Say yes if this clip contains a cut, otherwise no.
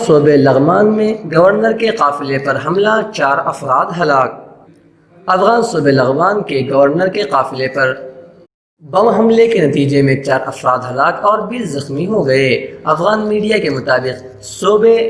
no